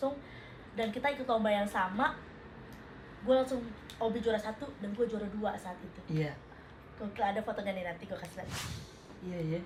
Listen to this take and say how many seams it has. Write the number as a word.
zero